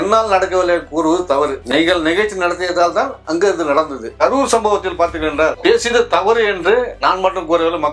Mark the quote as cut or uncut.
uncut